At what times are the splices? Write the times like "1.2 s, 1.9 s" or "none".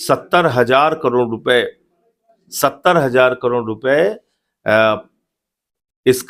none